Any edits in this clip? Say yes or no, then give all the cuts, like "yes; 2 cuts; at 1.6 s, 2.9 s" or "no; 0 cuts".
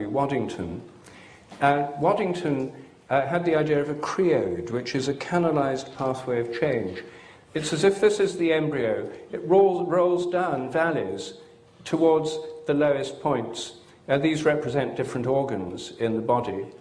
no; 0 cuts